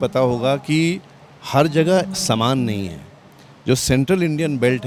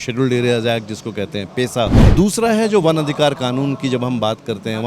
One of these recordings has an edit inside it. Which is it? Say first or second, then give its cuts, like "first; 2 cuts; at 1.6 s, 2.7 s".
second; 1 cut; at 2.0 s